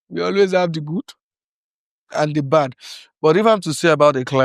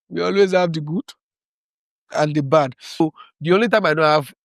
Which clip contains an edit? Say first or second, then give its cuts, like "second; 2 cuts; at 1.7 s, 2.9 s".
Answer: second; 1 cut; at 3.0 s